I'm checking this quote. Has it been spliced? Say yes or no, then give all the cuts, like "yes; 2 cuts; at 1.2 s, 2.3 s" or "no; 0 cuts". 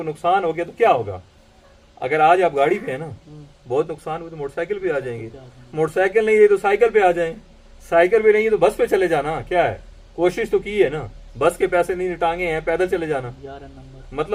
no; 0 cuts